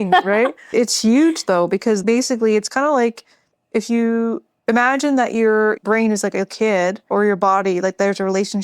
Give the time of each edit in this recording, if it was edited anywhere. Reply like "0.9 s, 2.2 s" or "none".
0.7 s, 2.0 s, 7.1 s